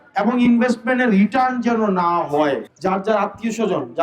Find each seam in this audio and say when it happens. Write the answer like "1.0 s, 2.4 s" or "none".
2.6 s